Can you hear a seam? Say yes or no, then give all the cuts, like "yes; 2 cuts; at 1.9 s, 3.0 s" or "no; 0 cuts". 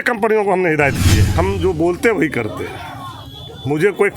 yes; 1 cut; at 1.3 s